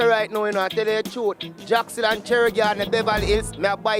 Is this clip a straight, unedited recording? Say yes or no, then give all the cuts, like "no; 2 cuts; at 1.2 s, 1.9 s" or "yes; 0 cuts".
yes; 0 cuts